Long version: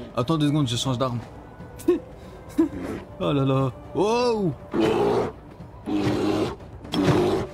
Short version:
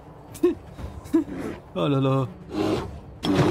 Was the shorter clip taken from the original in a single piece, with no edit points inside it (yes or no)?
no